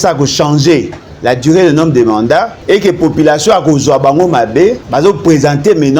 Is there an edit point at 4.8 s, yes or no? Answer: yes